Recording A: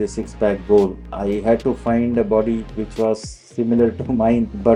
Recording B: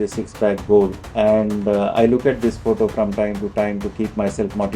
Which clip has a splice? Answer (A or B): B